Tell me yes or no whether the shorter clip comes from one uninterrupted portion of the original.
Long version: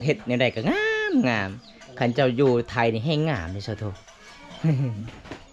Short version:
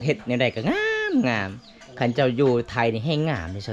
yes